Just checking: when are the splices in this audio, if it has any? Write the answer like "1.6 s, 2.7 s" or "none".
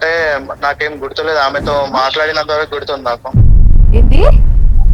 none